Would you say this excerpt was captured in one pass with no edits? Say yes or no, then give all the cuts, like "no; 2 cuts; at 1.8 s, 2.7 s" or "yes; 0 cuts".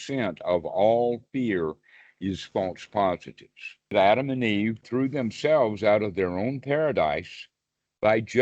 no; 2 cuts; at 3.9 s, 4.9 s